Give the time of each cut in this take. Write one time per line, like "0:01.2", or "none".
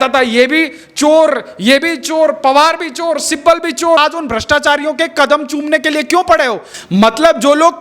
0:04.0
0:06.7